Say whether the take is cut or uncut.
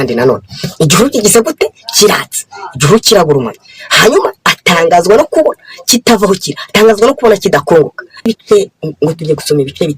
cut